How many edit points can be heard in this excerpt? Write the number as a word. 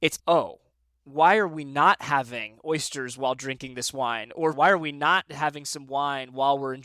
one